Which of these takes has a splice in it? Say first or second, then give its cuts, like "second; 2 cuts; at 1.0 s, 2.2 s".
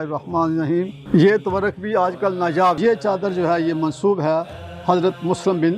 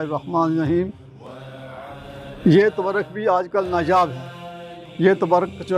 first; 2 cuts; at 1.0 s, 2.8 s